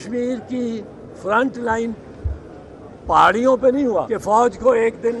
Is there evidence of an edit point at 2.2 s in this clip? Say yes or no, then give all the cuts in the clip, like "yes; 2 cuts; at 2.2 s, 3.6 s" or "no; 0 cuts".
no; 1 cut; at 4.0 s